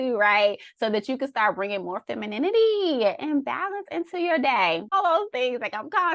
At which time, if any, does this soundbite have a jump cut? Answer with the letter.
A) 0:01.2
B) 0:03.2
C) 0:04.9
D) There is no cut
C